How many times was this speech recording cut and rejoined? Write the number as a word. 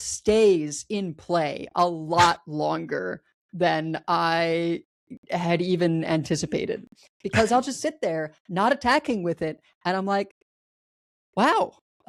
zero